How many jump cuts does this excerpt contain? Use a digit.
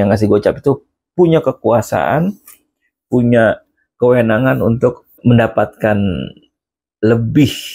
1